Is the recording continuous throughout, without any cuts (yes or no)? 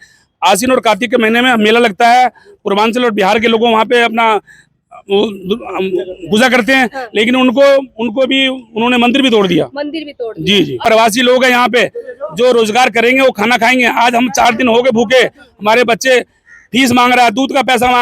no